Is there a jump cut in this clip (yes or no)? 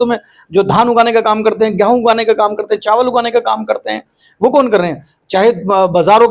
no